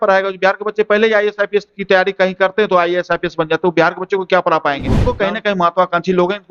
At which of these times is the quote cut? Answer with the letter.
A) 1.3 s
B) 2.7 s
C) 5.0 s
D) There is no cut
C